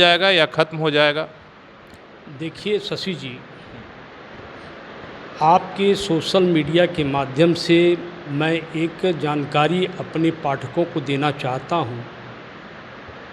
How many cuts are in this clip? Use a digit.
0